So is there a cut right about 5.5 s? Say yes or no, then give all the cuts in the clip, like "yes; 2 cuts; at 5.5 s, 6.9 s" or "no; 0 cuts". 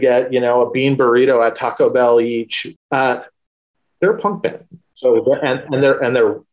no; 1 cut; at 2.6 s